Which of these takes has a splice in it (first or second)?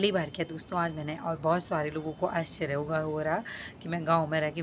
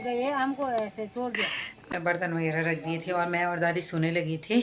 second